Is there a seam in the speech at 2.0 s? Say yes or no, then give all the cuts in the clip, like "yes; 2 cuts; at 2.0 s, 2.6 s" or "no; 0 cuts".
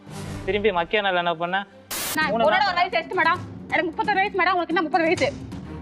yes; 1 cut; at 2.0 s